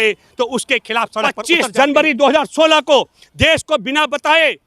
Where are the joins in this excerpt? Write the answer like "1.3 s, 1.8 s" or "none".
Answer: 1.4 s

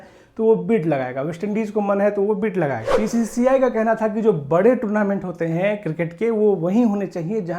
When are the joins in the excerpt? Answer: 2.9 s

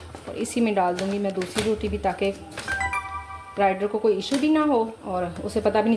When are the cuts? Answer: 5.0 s

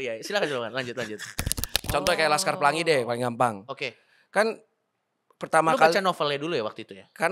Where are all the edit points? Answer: 1.7 s

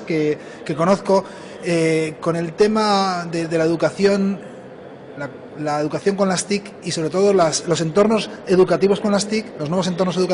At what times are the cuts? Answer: 5.8 s

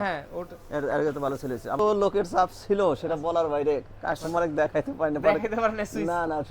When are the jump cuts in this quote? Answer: 1.8 s

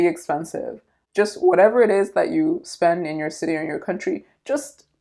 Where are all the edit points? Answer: 1.0 s

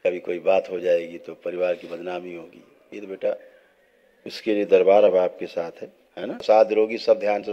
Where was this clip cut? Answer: 6.3 s

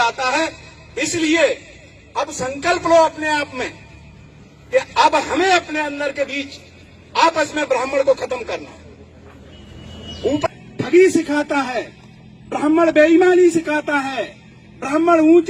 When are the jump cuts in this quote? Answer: 10.5 s

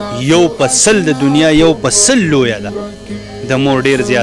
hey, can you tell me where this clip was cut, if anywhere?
none

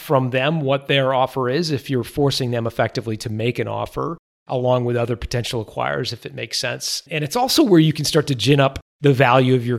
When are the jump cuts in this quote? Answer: 7.0 s, 8.9 s

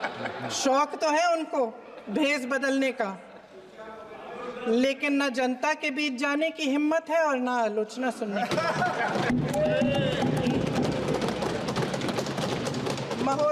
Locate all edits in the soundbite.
none

